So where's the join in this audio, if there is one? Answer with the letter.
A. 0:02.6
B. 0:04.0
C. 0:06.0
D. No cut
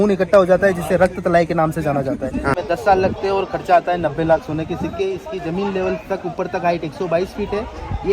A